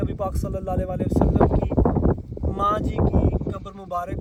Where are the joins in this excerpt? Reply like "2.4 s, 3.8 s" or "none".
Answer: none